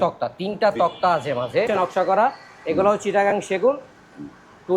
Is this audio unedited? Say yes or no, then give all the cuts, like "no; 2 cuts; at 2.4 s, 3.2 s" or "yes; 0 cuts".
no; 1 cut; at 1.7 s